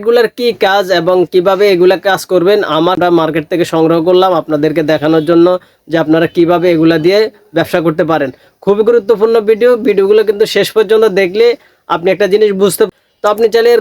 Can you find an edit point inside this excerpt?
yes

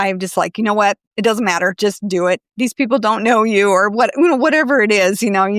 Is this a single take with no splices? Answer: no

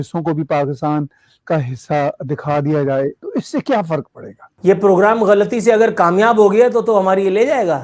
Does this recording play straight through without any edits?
no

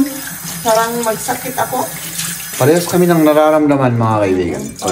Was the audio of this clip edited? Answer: no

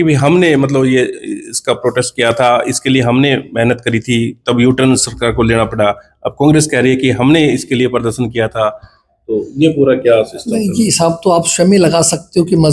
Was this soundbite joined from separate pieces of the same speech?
no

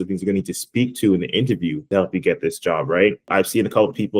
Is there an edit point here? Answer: yes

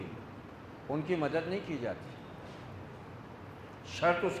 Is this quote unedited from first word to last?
yes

